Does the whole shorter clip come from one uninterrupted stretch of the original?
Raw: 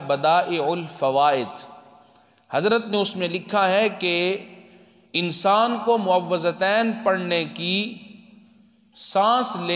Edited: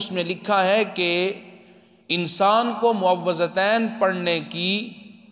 yes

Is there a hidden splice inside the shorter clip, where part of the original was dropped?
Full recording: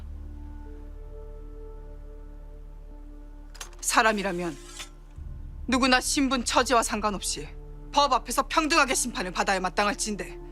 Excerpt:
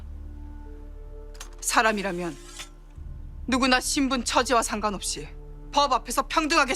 yes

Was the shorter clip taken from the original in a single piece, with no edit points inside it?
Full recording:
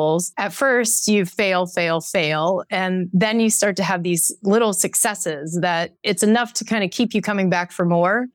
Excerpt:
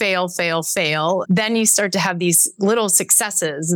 no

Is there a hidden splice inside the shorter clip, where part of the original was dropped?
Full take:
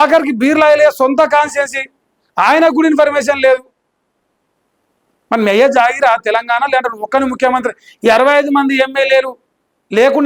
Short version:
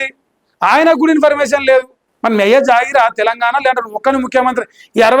yes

